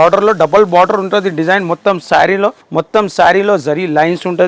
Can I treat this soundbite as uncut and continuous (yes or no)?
no